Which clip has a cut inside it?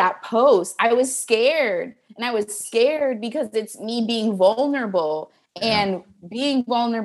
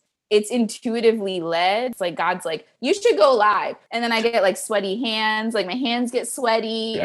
second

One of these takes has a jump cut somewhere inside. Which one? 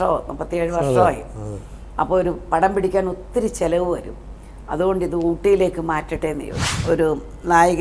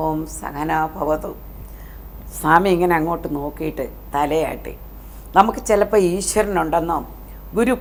first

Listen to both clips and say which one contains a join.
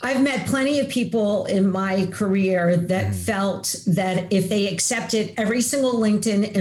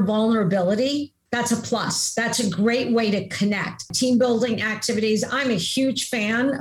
second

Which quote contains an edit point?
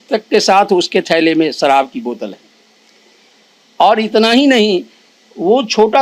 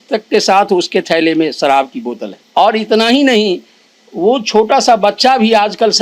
second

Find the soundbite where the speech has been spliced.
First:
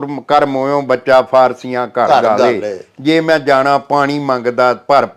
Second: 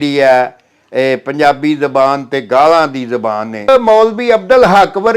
second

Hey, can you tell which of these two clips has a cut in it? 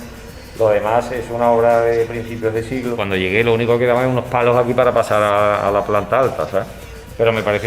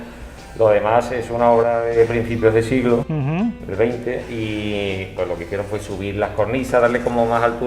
first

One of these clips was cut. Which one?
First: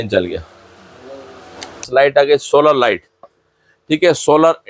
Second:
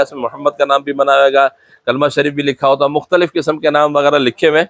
first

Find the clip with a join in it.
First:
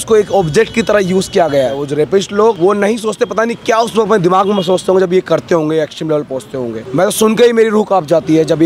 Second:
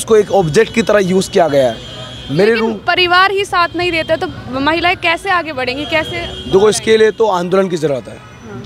first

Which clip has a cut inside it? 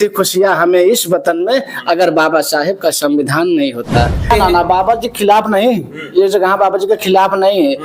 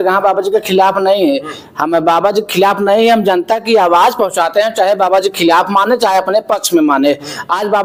first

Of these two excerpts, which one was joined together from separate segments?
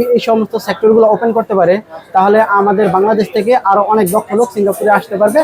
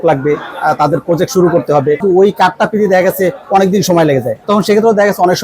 second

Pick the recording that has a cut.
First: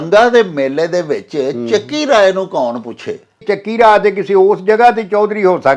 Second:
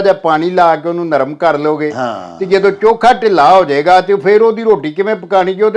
first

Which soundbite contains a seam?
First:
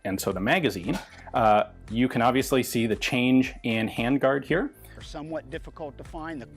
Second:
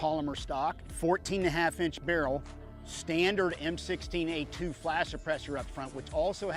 first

